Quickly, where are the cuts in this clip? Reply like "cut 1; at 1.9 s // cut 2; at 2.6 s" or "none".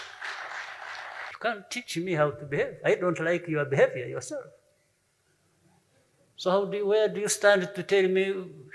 cut 1; at 1.3 s